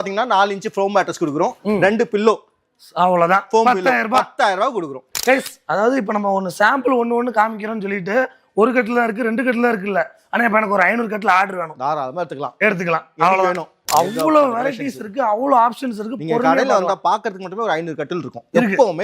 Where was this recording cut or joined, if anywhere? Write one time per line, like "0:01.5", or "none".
0:05.1
0:13.7